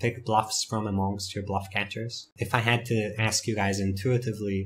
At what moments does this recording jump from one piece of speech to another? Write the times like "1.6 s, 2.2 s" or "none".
2.2 s